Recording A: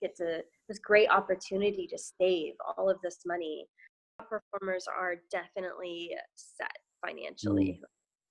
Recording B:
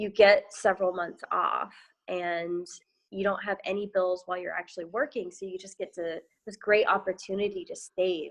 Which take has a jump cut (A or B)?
A